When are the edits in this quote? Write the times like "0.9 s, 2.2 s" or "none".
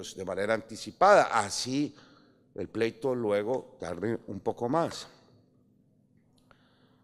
none